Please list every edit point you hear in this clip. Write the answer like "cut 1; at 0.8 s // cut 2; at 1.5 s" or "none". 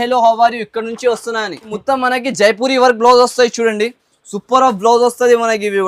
cut 1; at 1.7 s